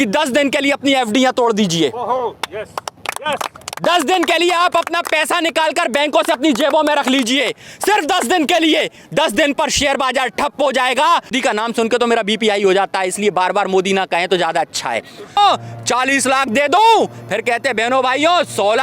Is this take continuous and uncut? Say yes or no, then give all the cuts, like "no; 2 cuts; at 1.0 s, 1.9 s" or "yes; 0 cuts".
no; 2 cuts; at 11.3 s, 15.4 s